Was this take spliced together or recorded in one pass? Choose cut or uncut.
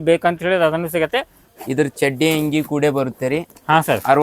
cut